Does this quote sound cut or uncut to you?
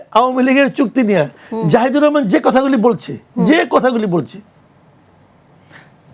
uncut